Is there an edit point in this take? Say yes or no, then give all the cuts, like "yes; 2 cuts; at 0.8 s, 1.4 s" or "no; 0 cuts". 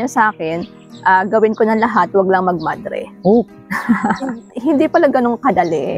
yes; 1 cut; at 4.5 s